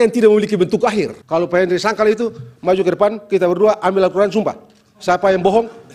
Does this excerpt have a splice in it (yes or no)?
yes